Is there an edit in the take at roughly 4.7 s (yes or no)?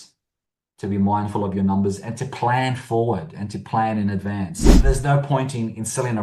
yes